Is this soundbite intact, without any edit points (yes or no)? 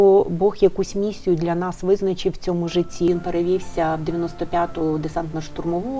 no